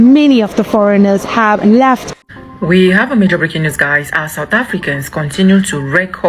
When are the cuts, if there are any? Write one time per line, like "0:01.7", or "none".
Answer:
0:02.2

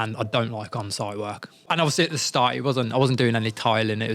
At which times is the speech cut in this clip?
0:01.7

